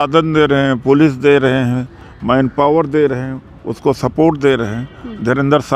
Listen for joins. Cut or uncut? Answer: uncut